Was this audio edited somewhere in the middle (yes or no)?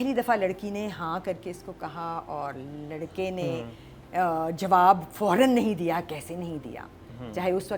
no